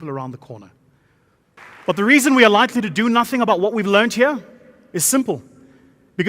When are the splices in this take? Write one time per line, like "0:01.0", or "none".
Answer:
0:01.6